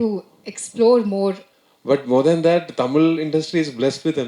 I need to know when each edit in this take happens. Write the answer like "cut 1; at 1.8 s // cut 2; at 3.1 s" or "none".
cut 1; at 1.5 s